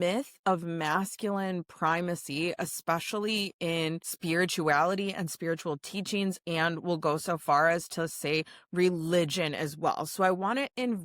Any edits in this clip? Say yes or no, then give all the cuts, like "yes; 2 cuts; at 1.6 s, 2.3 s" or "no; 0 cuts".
yes; 1 cut; at 4.1 s